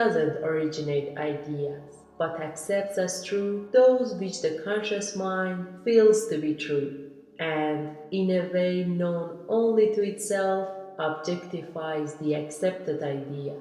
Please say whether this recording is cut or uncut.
uncut